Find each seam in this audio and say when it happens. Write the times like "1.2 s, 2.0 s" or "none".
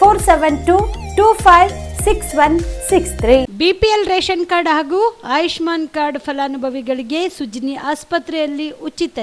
3.5 s